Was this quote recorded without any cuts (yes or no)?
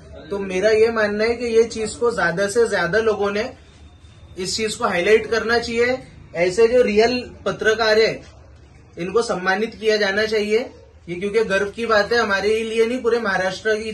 yes